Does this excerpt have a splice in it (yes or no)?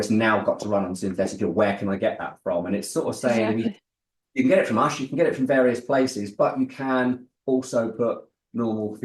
no